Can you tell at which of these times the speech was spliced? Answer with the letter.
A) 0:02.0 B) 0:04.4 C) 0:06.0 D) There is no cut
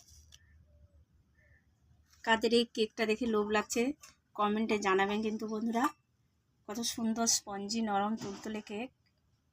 A